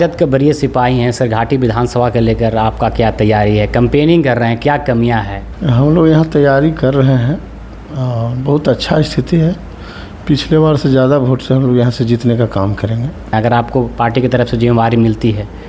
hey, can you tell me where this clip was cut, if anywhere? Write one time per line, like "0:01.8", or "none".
0:05.4
0:13.3